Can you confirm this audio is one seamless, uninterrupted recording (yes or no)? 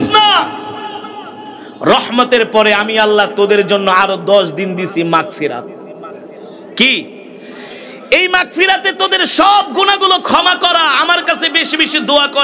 yes